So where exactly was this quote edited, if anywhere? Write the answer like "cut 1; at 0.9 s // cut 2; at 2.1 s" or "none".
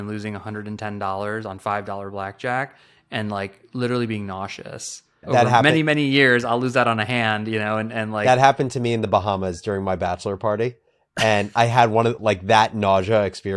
cut 1; at 5.3 s